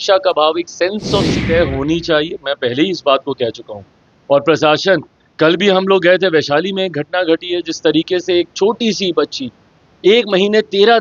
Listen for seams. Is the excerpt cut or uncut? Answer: cut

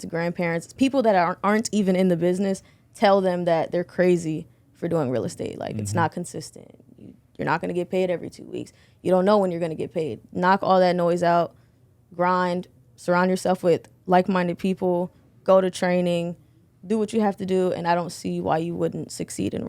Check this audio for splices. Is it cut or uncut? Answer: uncut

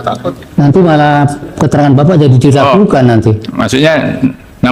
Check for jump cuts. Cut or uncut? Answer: uncut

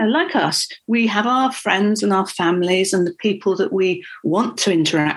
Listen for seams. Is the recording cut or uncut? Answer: uncut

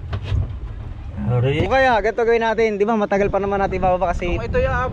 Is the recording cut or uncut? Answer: cut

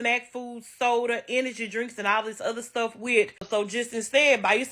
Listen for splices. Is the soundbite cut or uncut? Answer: cut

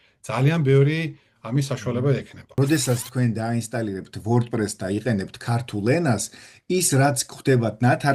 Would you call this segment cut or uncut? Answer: cut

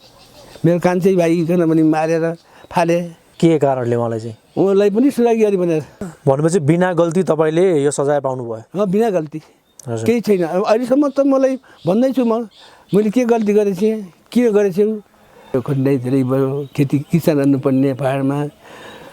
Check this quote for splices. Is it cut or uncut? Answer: cut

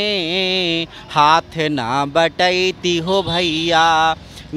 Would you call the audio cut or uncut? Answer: uncut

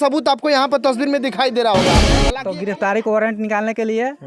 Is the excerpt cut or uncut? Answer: cut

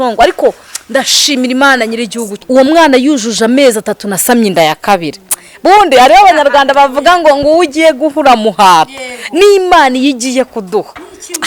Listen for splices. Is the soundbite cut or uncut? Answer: cut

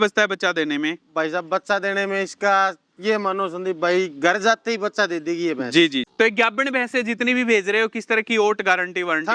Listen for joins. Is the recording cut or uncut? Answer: cut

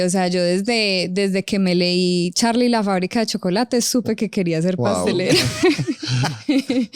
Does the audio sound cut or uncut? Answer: uncut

